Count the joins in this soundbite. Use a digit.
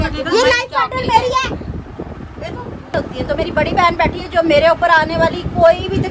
2